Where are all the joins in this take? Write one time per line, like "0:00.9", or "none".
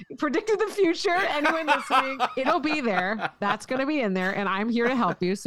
none